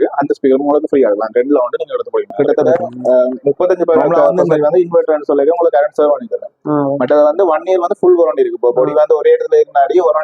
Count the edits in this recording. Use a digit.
1